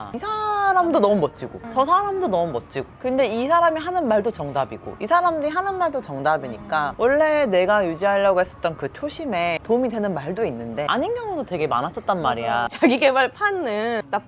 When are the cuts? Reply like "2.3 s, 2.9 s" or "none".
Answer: none